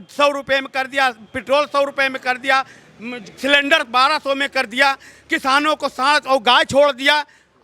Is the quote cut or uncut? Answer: uncut